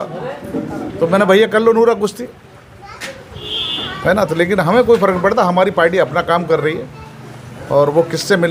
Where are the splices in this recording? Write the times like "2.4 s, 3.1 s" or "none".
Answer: none

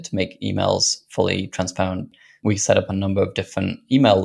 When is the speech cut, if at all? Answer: 2.1 s

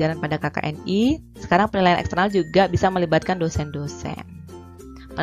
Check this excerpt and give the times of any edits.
1.3 s

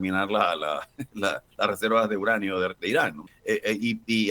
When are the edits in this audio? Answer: 3.3 s

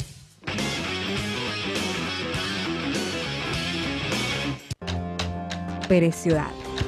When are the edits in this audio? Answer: 4.7 s

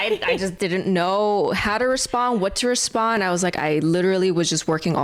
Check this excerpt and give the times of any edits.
none

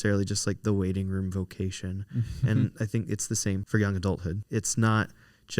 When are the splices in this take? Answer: 3.6 s, 4.4 s

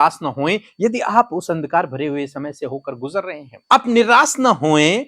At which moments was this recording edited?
3.5 s

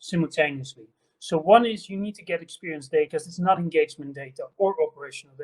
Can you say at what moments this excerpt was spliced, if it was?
3.1 s

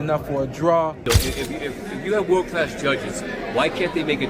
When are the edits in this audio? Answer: 1.1 s

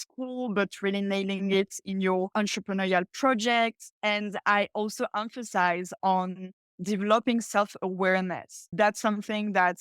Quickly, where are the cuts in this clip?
3.9 s

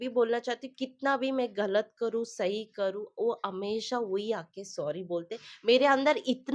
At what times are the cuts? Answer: none

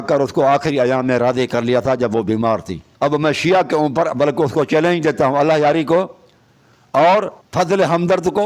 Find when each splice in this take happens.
2.8 s

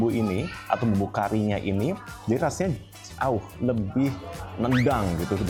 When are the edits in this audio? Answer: none

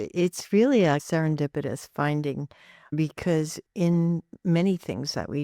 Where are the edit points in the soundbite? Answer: 1.0 s

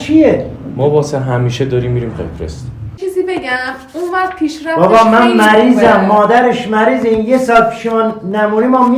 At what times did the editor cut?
3.0 s

